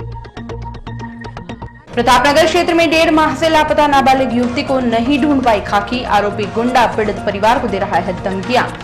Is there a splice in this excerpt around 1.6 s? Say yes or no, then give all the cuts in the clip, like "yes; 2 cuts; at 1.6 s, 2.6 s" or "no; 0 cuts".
yes; 1 cut; at 1.6 s